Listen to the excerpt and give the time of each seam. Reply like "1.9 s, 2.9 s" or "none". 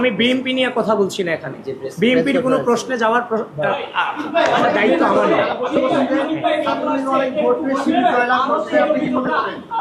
none